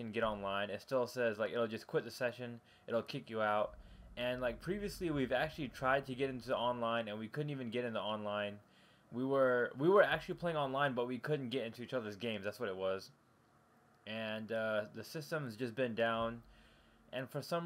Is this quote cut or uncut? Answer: uncut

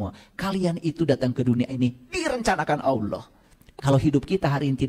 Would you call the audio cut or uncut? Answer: cut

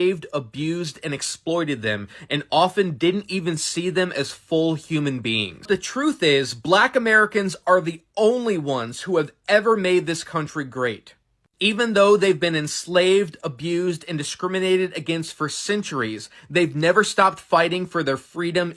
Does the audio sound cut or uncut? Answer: cut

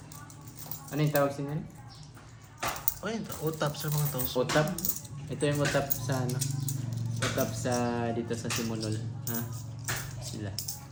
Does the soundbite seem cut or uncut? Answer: uncut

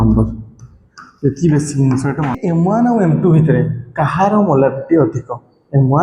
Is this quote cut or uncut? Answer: cut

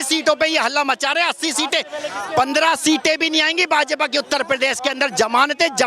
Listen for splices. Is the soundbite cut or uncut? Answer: uncut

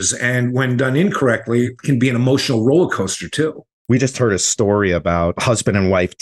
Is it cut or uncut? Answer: cut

